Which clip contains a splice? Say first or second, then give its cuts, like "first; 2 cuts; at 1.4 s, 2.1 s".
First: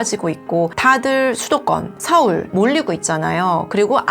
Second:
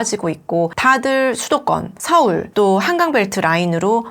first; 1 cut; at 2.5 s